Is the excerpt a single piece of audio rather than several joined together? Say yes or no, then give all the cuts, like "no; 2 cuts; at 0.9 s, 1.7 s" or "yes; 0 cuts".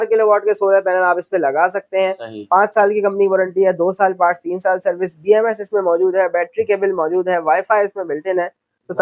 yes; 0 cuts